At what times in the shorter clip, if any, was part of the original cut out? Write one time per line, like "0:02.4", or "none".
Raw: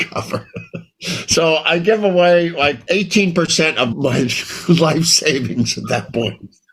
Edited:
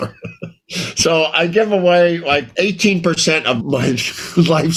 none

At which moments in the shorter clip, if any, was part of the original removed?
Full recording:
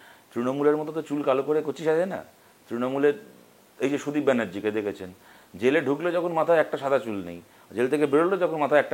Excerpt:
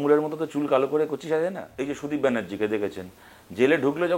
0:01.7

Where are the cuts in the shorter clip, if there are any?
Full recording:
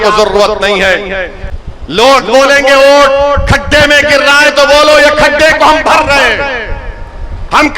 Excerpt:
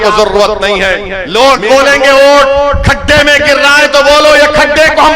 0:01.1

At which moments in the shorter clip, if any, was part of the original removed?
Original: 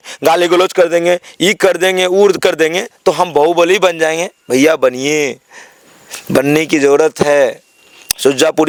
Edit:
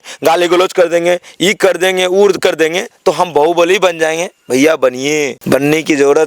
0:05.4

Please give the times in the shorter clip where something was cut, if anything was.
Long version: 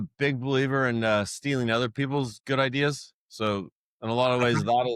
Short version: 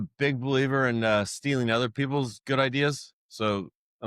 none

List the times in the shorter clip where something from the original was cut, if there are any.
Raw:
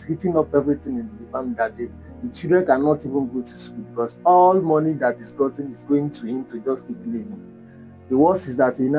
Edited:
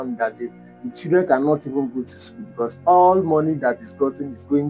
none

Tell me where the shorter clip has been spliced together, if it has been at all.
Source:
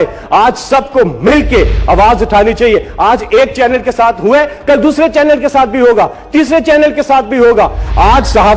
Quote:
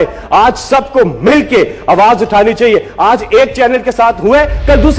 none

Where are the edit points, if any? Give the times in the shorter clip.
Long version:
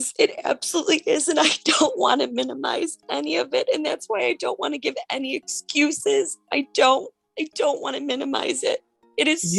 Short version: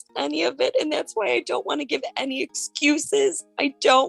none

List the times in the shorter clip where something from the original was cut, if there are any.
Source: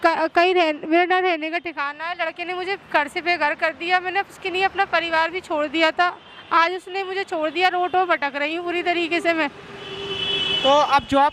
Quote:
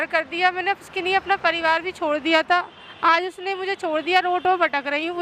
none

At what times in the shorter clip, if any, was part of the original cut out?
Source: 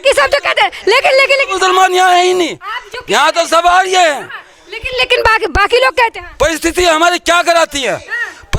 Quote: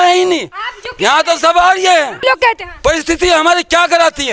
0:02.2

